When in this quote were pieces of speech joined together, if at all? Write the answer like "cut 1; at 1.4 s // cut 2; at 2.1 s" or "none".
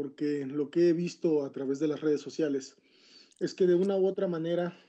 cut 1; at 2.8 s